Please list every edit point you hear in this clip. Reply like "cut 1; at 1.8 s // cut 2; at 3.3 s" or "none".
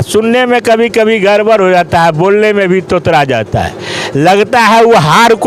none